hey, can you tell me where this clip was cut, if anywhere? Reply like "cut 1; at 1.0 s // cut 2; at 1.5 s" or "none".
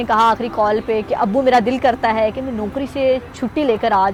none